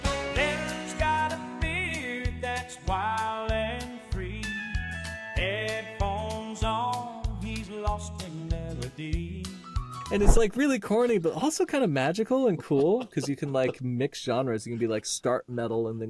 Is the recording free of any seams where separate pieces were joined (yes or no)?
yes